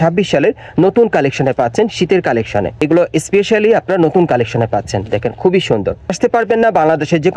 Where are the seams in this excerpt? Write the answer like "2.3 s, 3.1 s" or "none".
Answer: 2.8 s, 6.1 s